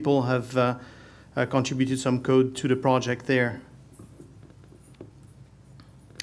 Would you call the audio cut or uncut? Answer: uncut